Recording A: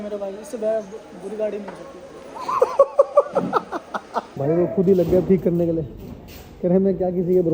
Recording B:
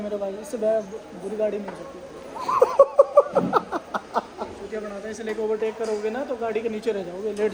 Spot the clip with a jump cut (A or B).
A